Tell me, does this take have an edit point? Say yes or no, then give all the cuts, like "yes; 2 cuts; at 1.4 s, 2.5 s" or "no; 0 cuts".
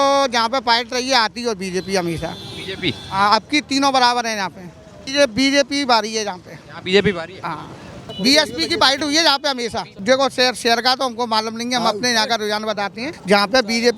yes; 4 cuts; at 5.0 s, 8.0 s, 9.9 s, 13.1 s